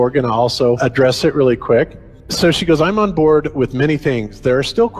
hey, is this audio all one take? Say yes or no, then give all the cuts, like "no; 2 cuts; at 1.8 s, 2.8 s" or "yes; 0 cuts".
yes; 0 cuts